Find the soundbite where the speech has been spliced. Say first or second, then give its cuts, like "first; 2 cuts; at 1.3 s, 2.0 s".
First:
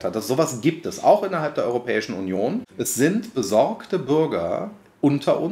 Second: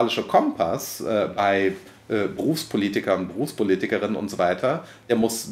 first; 1 cut; at 2.7 s